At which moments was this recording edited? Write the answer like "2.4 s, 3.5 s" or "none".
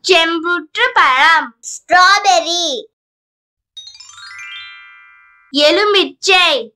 none